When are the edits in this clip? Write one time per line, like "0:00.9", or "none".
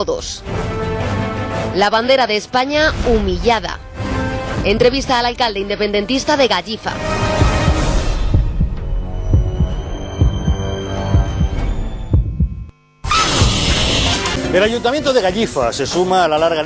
0:15.3